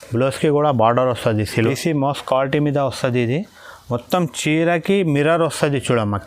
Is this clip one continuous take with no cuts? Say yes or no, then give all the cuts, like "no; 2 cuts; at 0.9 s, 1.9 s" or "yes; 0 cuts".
no; 1 cut; at 1.5 s